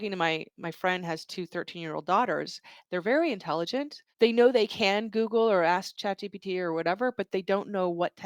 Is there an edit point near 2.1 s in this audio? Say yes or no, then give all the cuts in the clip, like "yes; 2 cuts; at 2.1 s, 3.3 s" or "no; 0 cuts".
no; 2 cuts; at 4.0 s, 5.9 s